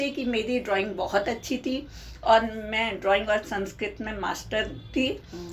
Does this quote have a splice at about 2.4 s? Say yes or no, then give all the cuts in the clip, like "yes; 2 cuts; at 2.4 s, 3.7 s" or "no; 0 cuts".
no; 0 cuts